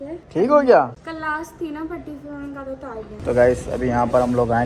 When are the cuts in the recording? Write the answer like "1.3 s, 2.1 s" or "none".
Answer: 3.2 s